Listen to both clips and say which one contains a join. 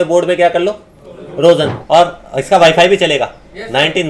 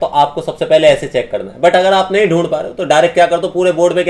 first; 1 cut; at 1.8 s

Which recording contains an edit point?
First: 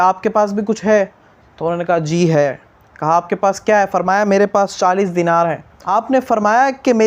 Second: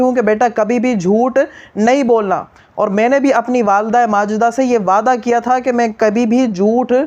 first; 1 cut; at 5.8 s

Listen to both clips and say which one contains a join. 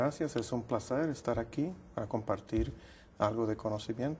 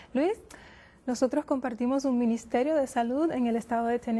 second; 1 cut; at 1.0 s

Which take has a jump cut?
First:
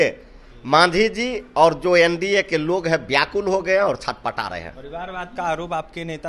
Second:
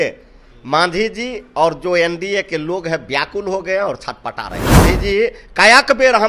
second; 1 cut; at 4.8 s

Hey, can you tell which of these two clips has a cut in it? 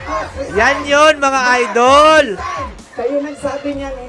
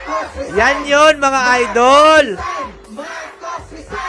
first; 1 cut; at 2.8 s

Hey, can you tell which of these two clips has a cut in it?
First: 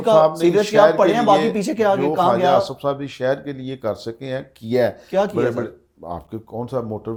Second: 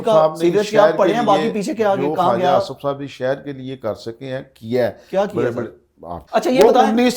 second; 1 cut; at 6.2 s

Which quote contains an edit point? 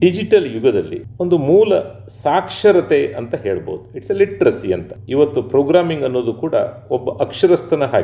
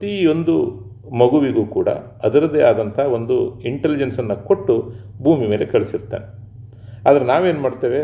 first; 2 cuts; at 1.0 s, 4.9 s

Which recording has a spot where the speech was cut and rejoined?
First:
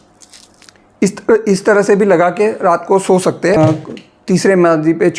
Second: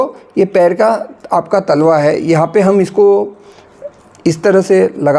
first; 1 cut; at 3.6 s

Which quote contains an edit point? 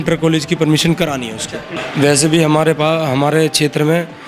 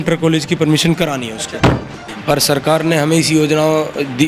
second; 1 cut; at 1.9 s

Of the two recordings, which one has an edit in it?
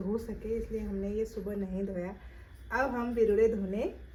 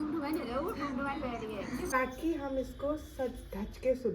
second; 1 cut; at 1.9 s

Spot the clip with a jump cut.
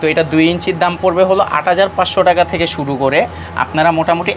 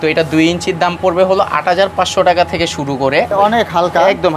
second; 1 cut; at 3.3 s

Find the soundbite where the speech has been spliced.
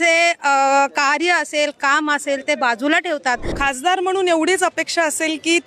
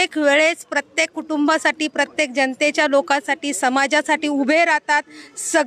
first; 1 cut; at 3.5 s

